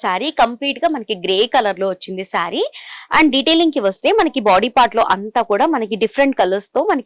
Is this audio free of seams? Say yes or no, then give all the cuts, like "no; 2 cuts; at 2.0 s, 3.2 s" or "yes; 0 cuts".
yes; 0 cuts